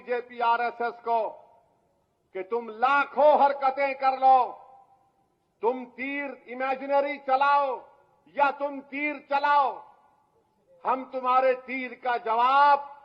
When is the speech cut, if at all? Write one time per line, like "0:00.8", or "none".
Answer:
none